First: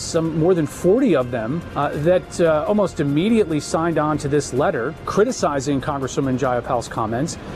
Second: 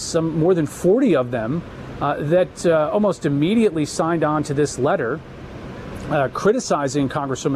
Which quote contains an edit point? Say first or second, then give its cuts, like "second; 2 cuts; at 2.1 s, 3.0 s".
first; 2 cuts; at 1.6 s, 5.1 s